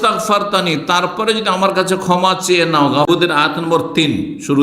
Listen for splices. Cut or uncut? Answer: cut